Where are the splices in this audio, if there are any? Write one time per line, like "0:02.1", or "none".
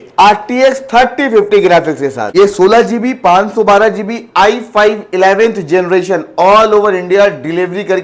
0:02.2